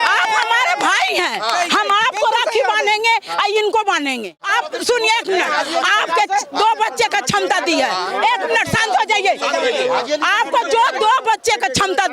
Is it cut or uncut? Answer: cut